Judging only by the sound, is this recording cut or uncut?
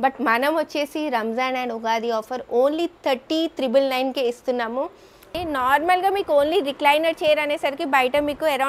cut